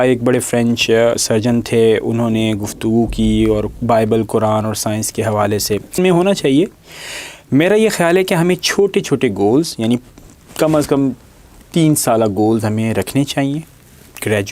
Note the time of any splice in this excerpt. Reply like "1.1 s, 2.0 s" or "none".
6.0 s